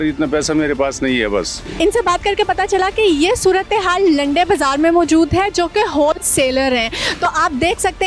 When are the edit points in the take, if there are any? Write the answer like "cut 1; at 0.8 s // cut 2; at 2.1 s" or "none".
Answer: none